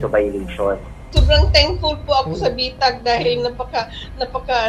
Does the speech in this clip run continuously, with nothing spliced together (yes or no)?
no